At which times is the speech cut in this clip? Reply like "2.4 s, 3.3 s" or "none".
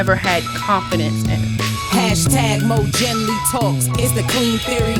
1.2 s